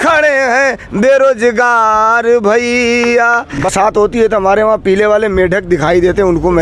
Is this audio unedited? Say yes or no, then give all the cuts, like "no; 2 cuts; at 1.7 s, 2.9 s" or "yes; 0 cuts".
no; 1 cut; at 3.7 s